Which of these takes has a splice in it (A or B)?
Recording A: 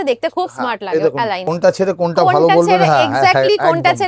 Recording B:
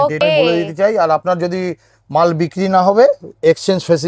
A